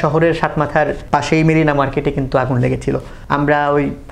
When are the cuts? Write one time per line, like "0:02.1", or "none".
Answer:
0:01.0
0:03.1